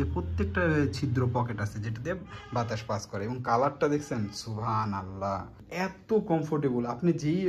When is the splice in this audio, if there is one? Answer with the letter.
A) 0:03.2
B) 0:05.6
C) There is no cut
B